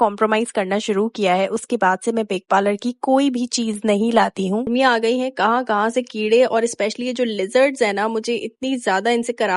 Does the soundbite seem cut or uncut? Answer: cut